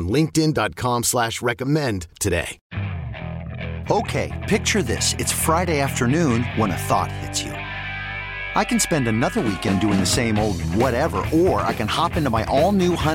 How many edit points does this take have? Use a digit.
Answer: 1